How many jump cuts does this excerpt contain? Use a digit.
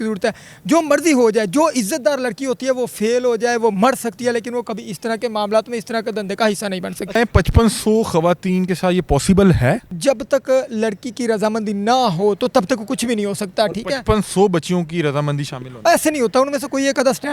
2